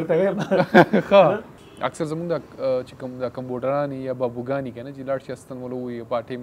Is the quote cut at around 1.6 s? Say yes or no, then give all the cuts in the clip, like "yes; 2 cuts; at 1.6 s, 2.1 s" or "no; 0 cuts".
yes; 1 cut; at 1.6 s